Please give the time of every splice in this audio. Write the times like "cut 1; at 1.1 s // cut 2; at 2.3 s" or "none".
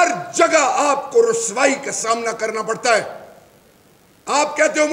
none

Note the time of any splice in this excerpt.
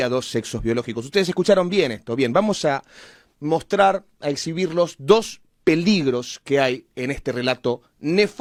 none

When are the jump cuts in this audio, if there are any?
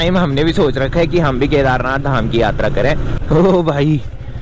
cut 1; at 3.1 s

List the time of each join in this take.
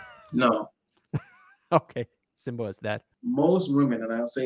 cut 1; at 3.1 s

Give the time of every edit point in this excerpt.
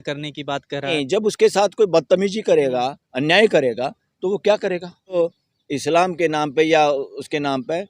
cut 1; at 0.9 s // cut 2; at 5.2 s

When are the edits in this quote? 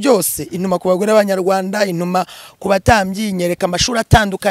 none

